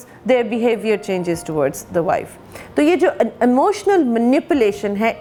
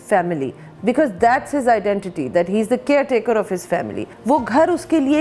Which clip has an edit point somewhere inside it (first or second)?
second